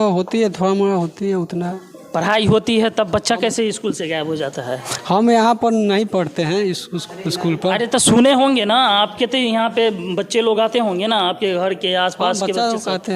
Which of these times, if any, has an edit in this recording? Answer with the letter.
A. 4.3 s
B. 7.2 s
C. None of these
C